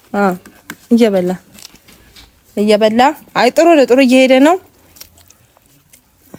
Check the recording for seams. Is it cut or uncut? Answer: uncut